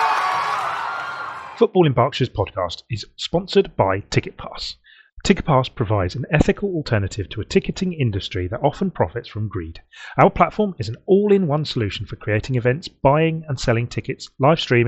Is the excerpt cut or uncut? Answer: cut